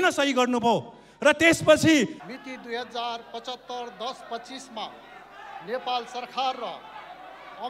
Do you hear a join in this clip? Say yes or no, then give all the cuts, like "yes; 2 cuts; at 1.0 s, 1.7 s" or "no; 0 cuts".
yes; 1 cut; at 2.3 s